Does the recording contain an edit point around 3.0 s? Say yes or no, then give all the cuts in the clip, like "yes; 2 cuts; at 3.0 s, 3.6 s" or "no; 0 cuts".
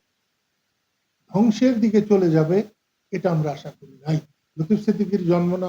no; 1 cut; at 4.4 s